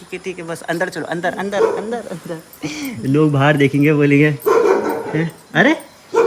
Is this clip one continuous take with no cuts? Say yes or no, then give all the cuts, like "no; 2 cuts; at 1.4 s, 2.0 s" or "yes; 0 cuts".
yes; 0 cuts